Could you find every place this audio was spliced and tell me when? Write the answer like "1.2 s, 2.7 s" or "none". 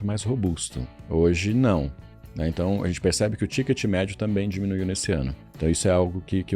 0.9 s, 5.4 s